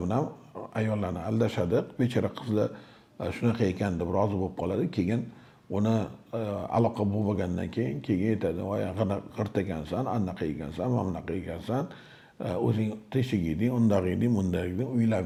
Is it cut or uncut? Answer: uncut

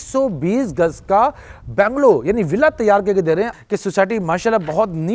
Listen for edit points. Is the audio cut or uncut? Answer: cut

